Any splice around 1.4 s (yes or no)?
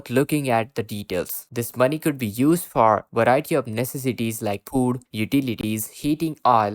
yes